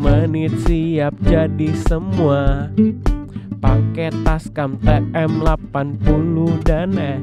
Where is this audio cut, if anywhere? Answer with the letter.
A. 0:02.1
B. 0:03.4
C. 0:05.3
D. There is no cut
D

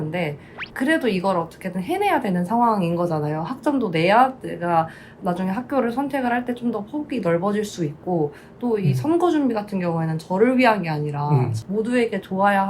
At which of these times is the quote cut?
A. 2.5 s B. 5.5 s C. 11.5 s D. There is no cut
C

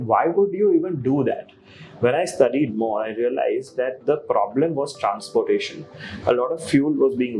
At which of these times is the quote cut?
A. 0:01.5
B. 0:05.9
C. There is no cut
C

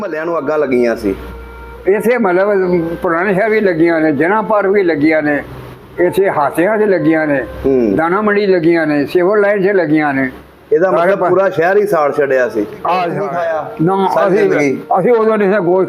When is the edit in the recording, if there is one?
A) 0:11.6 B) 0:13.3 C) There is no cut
B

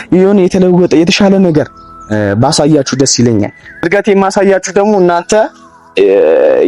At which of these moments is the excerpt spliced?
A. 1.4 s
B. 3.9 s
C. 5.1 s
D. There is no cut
B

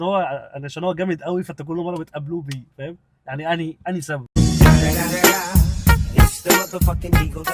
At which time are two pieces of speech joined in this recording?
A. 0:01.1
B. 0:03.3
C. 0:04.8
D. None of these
D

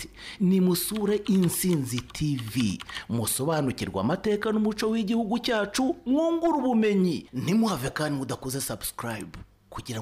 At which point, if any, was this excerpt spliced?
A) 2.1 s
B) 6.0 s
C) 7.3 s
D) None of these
D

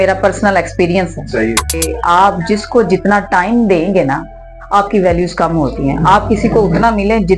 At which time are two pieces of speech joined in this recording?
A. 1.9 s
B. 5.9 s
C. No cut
A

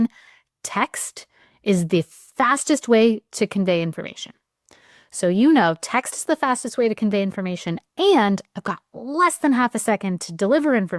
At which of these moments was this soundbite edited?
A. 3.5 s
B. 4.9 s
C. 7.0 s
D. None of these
D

